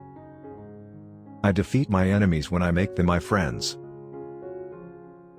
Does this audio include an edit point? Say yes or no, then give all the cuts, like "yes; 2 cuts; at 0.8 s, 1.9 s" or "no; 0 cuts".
yes; 2 cuts; at 0.9 s, 4.1 s